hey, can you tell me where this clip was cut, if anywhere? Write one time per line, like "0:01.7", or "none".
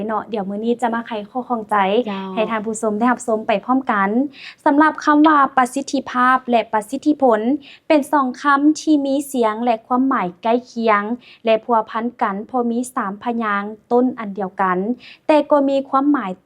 none